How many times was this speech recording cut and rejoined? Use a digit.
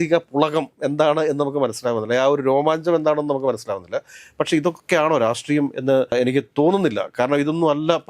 0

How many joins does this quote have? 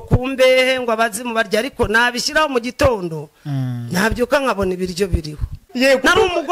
1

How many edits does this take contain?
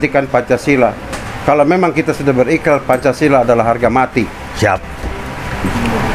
0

